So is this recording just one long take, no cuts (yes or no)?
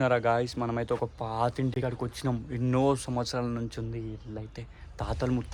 yes